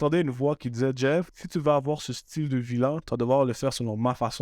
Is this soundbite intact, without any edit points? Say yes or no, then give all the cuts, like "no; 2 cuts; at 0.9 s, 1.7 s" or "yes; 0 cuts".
no; 1 cut; at 1.4 s